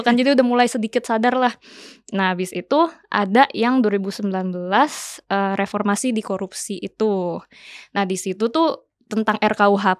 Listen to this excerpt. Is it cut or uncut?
uncut